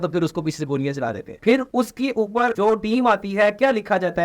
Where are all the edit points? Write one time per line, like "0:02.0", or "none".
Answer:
none